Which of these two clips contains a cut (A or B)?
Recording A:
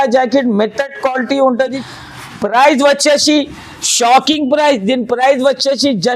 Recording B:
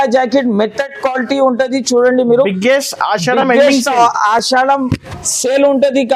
A